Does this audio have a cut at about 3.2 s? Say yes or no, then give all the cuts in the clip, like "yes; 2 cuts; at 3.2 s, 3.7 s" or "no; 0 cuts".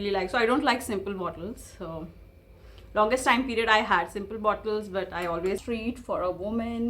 no; 1 cut; at 5.6 s